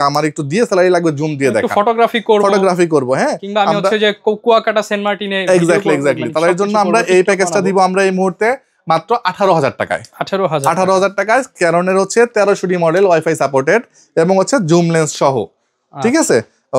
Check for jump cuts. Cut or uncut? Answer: uncut